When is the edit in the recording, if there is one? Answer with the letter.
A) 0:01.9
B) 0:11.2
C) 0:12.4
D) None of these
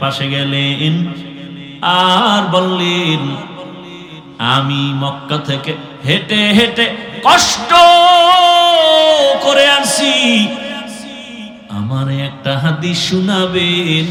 D